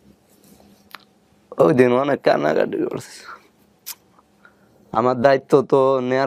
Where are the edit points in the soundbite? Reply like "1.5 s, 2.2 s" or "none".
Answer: 4.6 s